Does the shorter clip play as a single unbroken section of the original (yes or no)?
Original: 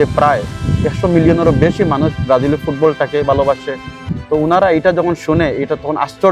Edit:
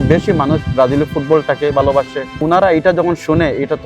no